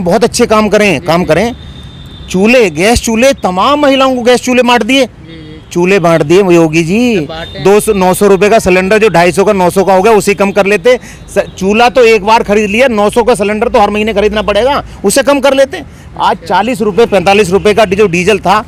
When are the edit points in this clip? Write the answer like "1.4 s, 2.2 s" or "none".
none